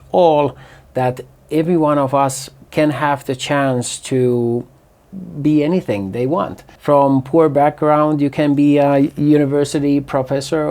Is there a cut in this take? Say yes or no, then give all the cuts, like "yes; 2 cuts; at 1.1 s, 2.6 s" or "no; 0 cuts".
no; 0 cuts